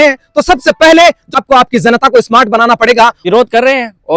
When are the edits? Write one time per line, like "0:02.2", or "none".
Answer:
0:01.4
0:03.2